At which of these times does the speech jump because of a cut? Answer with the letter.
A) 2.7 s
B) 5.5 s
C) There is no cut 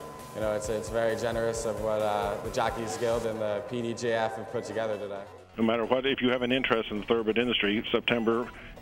B